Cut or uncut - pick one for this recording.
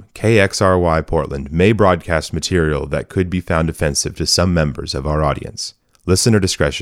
uncut